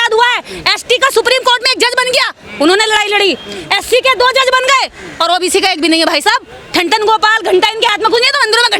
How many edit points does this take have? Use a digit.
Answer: 0